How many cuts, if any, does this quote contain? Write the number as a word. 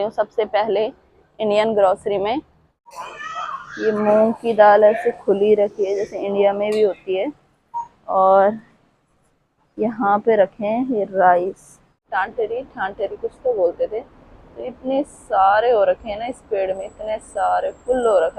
two